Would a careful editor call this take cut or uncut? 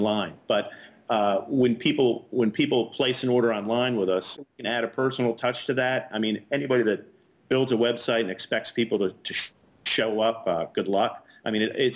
cut